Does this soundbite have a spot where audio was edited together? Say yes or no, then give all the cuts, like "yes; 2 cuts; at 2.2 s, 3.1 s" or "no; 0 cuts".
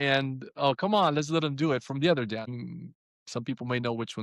yes; 1 cut; at 2.5 s